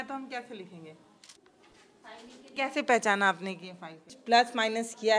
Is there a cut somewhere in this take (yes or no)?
yes